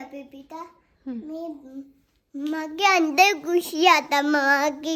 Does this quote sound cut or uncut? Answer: uncut